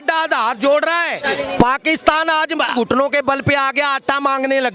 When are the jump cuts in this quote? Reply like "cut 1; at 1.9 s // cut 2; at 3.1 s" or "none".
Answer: cut 1; at 1.2 s // cut 2; at 2.7 s